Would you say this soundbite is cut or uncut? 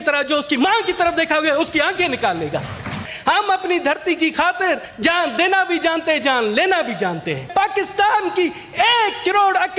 cut